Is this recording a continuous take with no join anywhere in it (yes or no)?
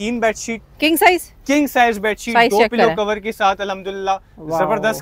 yes